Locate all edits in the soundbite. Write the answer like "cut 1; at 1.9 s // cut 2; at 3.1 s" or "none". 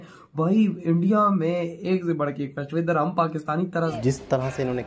cut 1; at 4.0 s